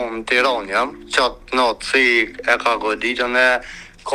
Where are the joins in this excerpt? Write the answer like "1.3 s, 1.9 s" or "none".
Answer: 1.0 s